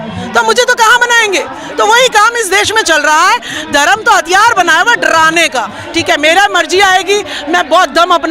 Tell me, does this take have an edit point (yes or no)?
yes